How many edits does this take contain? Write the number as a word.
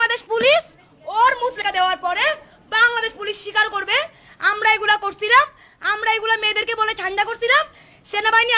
one